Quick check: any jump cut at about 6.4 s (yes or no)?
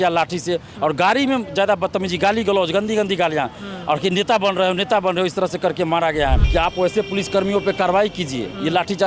yes